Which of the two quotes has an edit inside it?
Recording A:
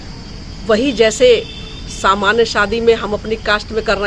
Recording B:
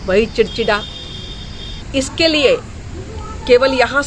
B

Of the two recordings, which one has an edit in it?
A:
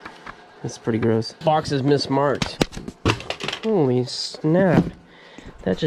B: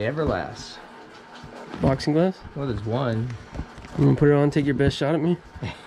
A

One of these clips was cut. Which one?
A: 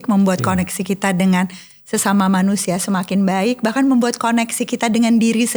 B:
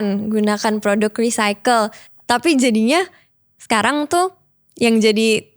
B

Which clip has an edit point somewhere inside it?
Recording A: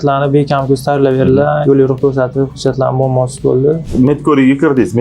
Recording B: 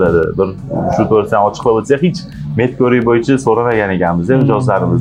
A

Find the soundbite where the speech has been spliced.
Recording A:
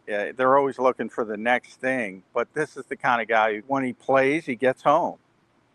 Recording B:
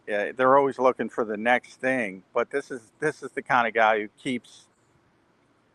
A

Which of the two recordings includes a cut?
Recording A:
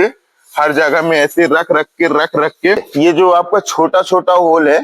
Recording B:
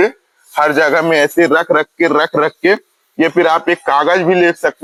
A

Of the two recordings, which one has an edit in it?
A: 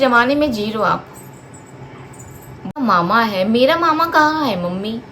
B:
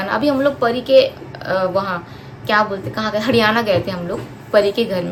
A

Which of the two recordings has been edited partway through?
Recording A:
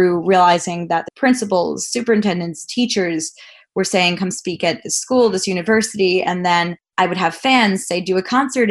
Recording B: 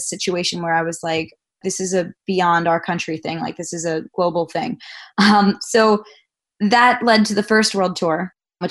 A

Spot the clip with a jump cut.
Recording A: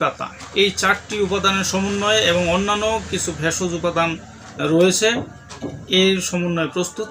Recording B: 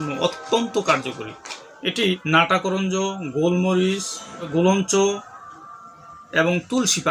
B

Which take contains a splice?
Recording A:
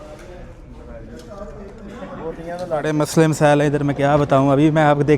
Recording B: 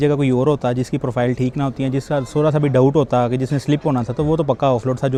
A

